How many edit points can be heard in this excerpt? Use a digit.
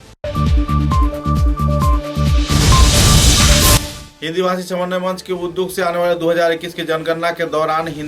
1